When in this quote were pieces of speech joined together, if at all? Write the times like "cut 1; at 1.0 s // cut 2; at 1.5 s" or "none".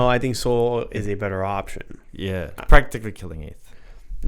cut 1; at 2.5 s

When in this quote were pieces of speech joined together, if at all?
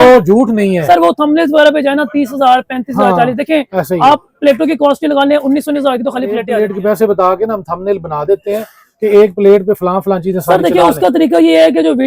cut 1; at 6.5 s

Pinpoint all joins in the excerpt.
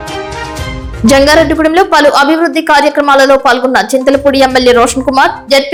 none

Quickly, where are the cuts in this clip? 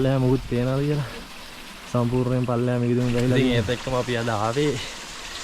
cut 1; at 3.5 s

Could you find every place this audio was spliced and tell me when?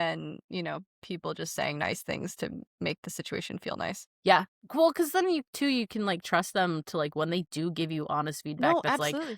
cut 1; at 4.1 s

